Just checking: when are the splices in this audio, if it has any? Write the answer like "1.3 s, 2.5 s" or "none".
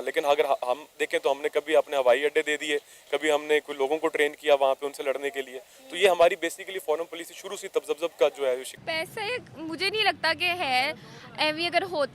8.7 s